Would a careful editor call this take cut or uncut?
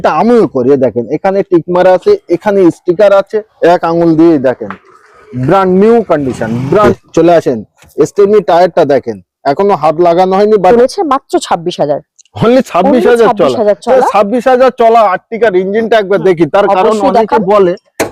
cut